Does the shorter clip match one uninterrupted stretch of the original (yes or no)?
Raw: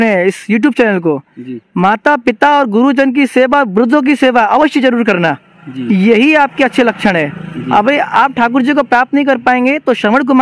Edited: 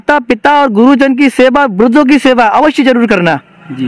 yes